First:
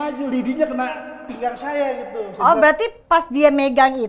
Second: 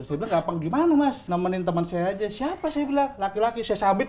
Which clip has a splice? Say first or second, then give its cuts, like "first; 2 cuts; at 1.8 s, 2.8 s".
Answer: second; 1 cut; at 1.2 s